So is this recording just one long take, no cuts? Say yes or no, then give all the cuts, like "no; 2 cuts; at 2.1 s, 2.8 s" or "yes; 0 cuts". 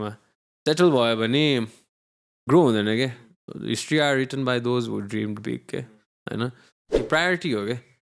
no; 1 cut; at 6.9 s